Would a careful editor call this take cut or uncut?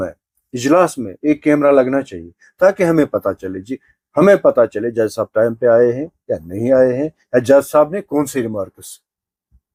uncut